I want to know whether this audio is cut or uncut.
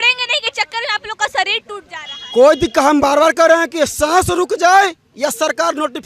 uncut